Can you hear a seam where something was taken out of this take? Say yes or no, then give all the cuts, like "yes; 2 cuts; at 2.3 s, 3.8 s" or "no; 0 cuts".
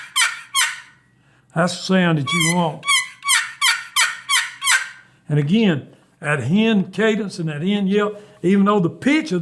no; 0 cuts